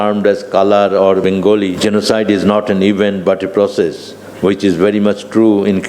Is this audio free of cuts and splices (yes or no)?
no